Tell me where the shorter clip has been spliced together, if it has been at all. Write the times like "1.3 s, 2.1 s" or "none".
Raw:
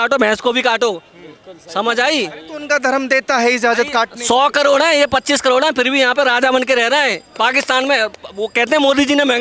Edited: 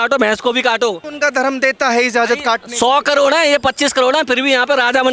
1.1 s